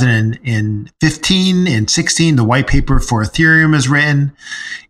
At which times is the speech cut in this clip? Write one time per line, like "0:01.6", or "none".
none